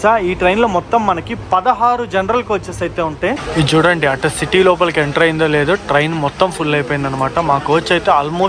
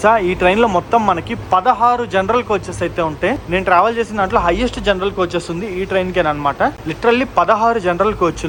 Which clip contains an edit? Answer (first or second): first